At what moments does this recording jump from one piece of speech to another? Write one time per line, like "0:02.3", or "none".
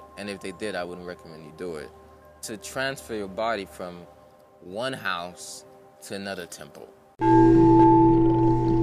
0:07.2